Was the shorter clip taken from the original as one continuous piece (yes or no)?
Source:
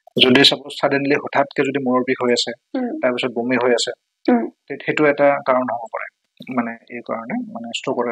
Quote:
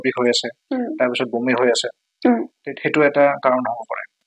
yes